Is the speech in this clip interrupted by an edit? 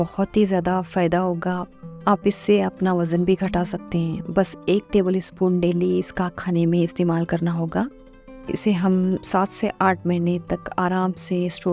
yes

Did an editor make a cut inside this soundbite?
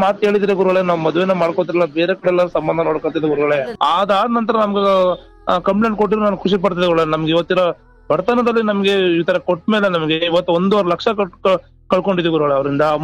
yes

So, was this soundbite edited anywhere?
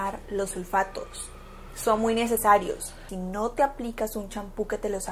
yes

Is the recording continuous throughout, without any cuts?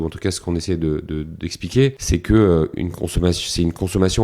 no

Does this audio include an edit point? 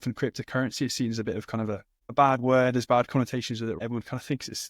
yes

